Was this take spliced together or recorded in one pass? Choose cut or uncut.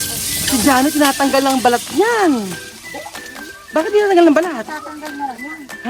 uncut